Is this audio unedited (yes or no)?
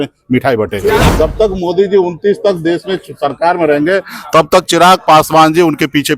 no